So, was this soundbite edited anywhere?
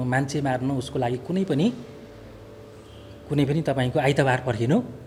no; 0 cuts

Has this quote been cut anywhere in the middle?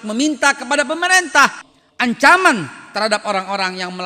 yes; 1 cut; at 1.7 s

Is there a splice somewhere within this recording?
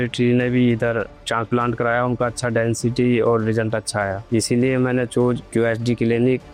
no; 0 cuts

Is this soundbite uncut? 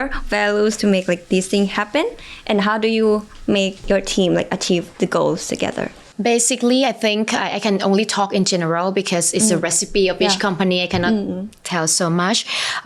yes; 0 cuts

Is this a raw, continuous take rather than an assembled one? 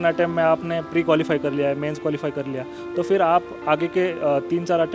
yes; 0 cuts

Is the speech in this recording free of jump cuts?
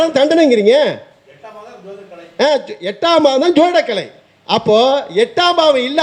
yes; 0 cuts

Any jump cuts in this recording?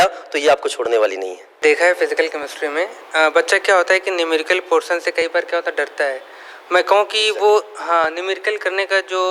no; 0 cuts

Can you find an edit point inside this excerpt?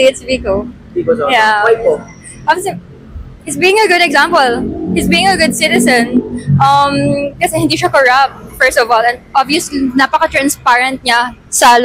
no; 0 cuts

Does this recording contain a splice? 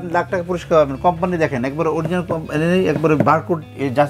no; 0 cuts

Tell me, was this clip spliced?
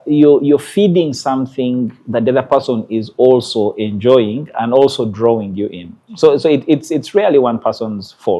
no; 0 cuts

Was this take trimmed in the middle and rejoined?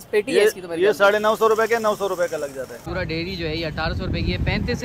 yes; 1 cut; at 2.8 s

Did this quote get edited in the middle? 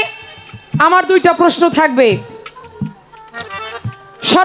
no; 0 cuts

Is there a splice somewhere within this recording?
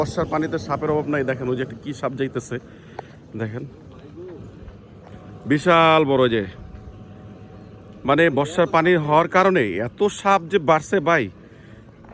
no; 0 cuts

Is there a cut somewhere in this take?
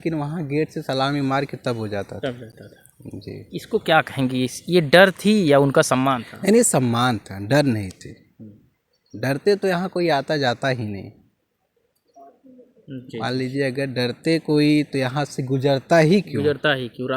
no; 0 cuts

